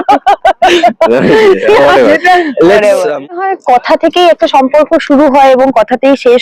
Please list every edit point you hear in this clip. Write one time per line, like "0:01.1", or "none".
0:03.4